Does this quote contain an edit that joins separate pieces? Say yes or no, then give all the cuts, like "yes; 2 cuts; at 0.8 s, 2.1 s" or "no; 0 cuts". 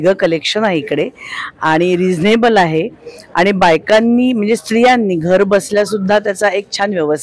no; 0 cuts